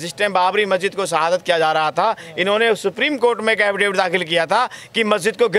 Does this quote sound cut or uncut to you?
uncut